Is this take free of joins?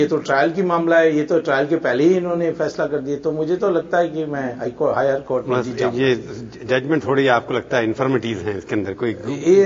yes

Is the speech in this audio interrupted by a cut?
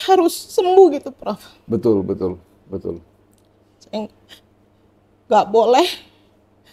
no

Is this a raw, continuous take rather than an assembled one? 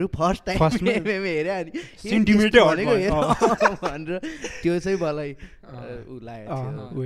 yes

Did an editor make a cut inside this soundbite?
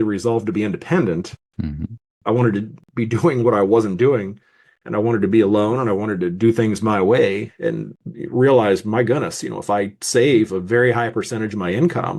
no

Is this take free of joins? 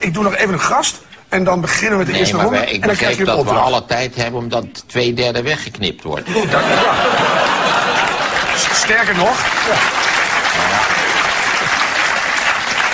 yes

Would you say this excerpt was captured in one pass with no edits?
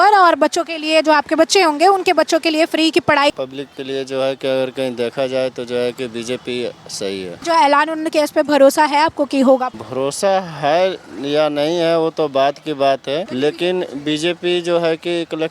no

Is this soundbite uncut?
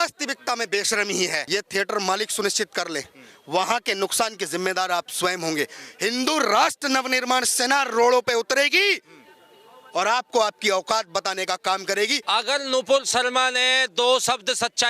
no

